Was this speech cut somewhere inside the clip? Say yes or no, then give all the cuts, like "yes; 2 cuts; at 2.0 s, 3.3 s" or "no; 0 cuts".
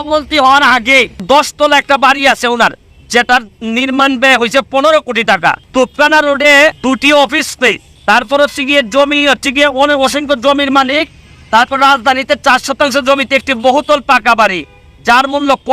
yes; 4 cuts; at 1.2 s, 5.6 s, 6.8 s, 7.9 s